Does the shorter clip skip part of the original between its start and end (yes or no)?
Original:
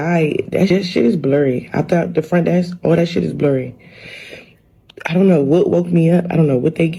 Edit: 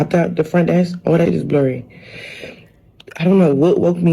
yes